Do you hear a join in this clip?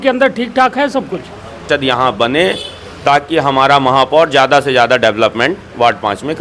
yes; 1 cut; at 1.6 s

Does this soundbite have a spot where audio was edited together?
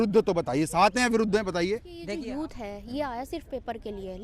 yes; 1 cut; at 2.1 s

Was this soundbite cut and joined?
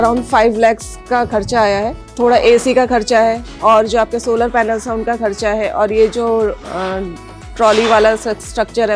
no; 0 cuts

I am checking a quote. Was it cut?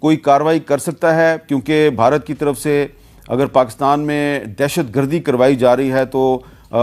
no; 0 cuts

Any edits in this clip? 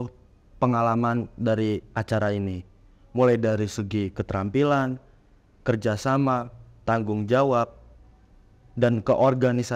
no; 0 cuts

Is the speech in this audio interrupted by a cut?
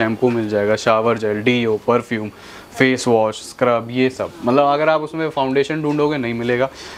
no; 0 cuts

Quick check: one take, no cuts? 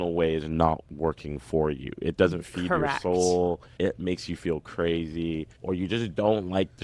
no; 3 cuts; at 0.9 s, 3.7 s, 5.5 s

